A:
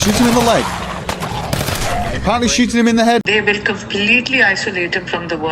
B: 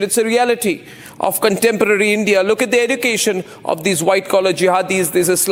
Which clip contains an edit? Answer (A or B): A